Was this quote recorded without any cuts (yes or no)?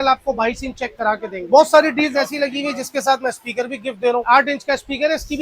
no